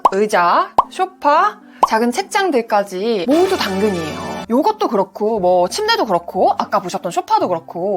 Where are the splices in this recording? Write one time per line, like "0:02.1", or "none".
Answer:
0:04.3